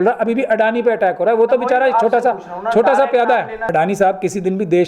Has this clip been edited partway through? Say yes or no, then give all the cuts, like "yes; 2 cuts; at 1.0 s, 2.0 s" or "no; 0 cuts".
yes; 1 cut; at 3.7 s